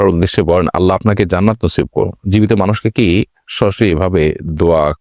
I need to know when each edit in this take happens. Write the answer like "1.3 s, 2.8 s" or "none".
none